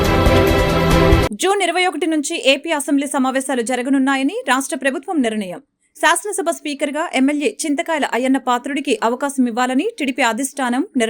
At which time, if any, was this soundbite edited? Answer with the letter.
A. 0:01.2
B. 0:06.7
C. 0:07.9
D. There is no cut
A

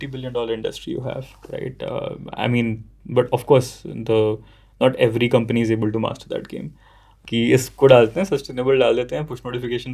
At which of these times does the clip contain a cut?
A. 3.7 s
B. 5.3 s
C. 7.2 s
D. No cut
C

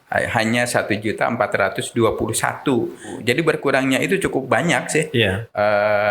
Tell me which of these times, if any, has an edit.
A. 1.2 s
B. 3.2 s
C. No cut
B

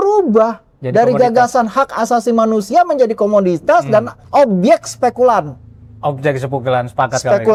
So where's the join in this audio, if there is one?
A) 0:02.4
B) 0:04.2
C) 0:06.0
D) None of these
D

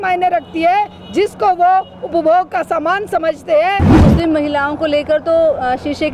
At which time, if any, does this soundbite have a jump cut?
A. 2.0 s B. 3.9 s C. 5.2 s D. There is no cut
B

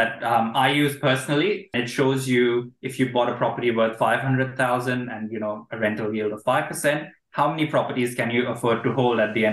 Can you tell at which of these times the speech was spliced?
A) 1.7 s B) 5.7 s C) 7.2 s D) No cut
A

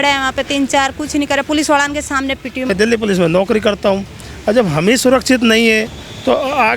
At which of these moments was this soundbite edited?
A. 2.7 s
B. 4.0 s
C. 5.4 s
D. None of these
A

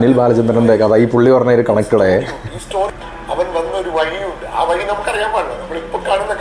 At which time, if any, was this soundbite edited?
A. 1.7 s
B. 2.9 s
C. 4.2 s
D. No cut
B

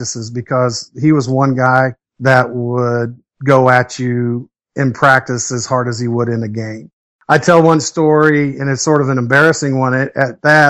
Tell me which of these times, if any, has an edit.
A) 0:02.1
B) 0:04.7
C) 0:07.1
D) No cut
C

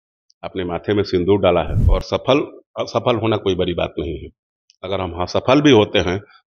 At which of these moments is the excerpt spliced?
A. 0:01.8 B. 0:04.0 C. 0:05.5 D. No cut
A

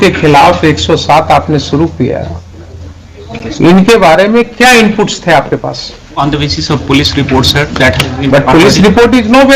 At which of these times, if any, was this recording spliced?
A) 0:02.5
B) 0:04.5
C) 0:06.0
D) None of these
D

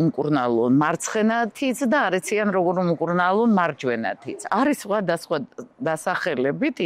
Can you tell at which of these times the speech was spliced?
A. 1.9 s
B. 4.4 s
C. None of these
B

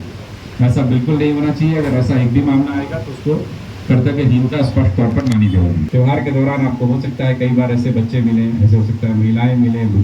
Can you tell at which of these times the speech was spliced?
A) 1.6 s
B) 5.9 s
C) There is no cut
B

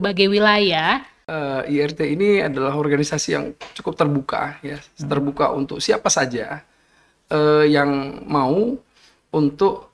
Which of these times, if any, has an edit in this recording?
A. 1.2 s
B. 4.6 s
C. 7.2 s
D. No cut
A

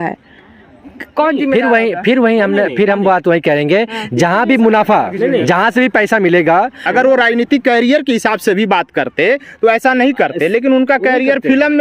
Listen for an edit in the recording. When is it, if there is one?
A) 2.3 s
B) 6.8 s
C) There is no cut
B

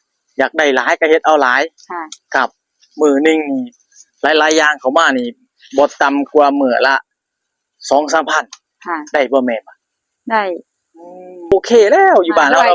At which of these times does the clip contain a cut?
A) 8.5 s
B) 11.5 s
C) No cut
B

